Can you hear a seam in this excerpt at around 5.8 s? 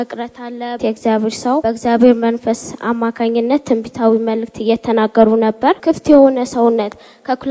yes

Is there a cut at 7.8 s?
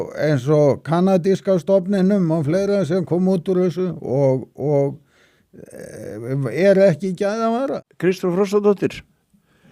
yes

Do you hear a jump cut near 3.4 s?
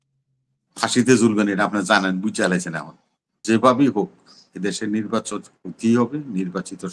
yes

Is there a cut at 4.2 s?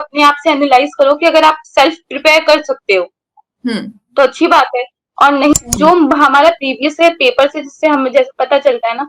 no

